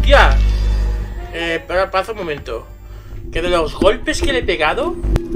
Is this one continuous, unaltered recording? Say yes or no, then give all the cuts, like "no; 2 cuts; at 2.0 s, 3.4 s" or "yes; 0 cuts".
yes; 0 cuts